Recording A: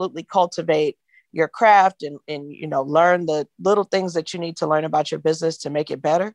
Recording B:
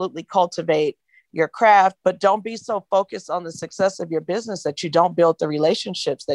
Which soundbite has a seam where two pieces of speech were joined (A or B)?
B